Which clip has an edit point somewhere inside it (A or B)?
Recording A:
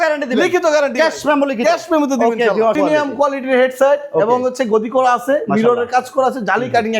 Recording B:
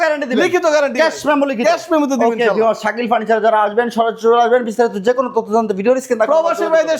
A